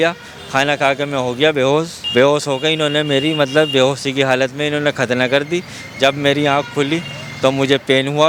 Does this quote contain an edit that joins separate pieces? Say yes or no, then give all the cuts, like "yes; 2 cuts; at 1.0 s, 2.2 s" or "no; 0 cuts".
no; 0 cuts